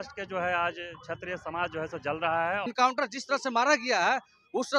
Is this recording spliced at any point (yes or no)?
yes